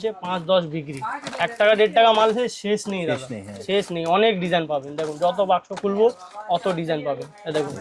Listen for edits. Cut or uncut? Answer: uncut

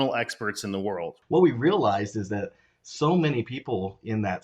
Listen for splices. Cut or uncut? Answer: cut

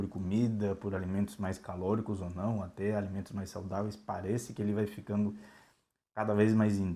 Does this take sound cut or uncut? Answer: uncut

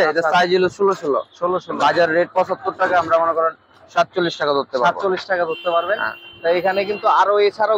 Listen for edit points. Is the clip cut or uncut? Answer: uncut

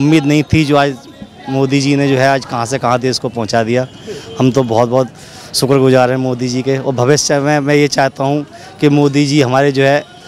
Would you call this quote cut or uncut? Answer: uncut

